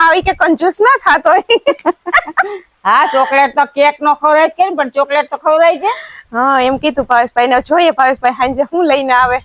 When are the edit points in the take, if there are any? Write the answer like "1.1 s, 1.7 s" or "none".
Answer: none